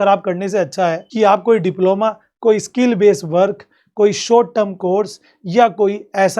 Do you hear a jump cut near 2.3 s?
no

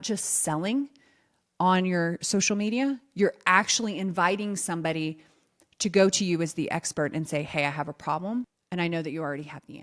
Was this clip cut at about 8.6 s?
yes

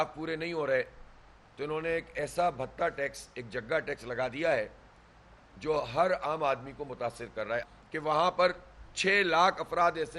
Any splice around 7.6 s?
yes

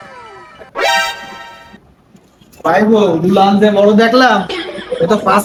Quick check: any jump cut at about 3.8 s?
no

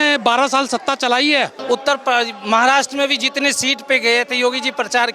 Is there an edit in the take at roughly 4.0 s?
no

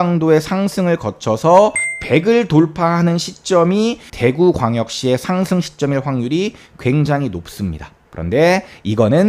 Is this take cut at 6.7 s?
no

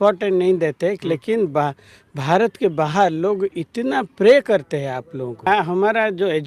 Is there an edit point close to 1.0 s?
no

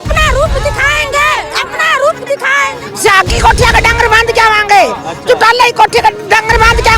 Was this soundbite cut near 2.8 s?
yes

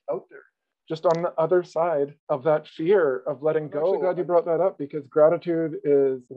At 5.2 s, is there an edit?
no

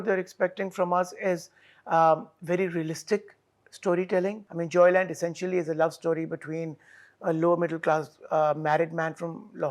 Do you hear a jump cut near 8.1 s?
no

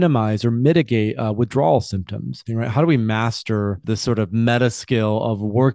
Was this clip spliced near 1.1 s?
no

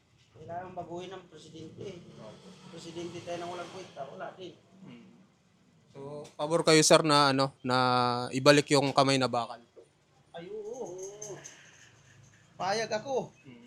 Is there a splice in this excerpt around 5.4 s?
no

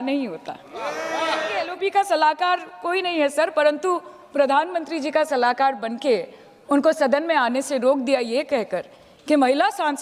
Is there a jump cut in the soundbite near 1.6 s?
yes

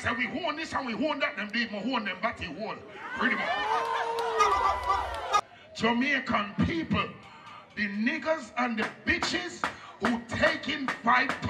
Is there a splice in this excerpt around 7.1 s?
no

